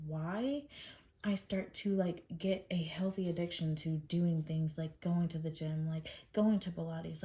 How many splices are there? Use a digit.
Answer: 0